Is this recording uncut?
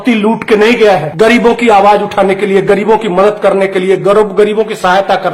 no; 1 cut; at 1.1 s

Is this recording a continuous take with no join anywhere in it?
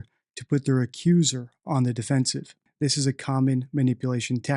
no; 1 cut; at 2.7 s

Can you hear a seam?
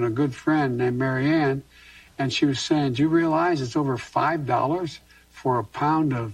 no; 0 cuts

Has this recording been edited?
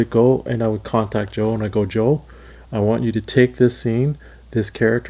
no; 0 cuts

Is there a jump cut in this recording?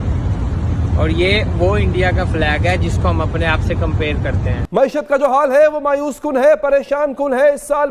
yes; 1 cut; at 4.6 s

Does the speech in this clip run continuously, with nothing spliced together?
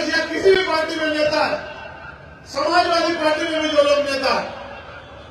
yes; 0 cuts

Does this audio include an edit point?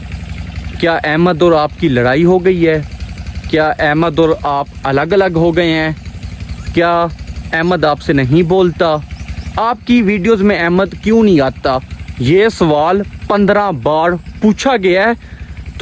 no; 0 cuts

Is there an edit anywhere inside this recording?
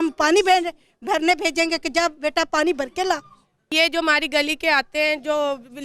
yes; 1 cut; at 3.7 s

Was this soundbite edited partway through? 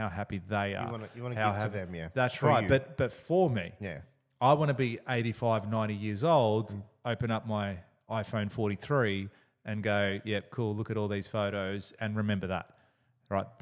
no; 0 cuts

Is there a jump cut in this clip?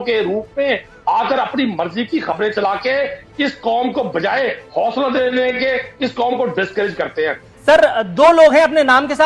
yes; 1 cut; at 7.5 s

